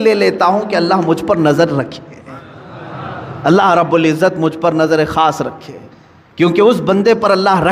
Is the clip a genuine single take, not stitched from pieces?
yes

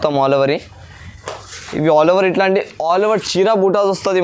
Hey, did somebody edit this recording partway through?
no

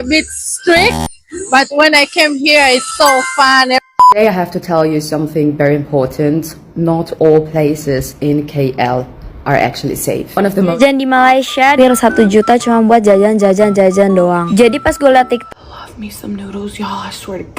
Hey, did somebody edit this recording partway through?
yes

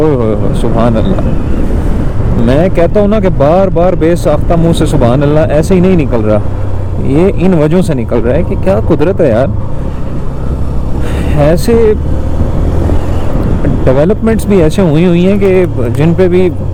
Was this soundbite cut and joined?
no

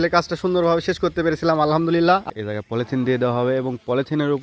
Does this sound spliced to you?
yes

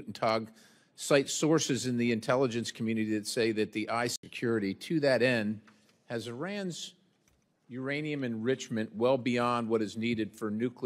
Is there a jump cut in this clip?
yes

